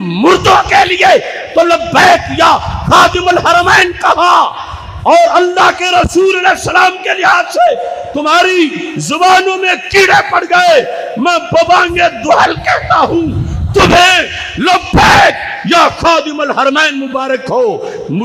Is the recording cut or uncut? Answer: uncut